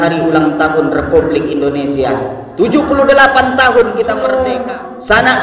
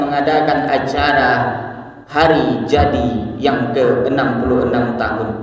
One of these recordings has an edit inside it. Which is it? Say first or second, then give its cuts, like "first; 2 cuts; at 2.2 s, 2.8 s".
first; 1 cut; at 4.2 s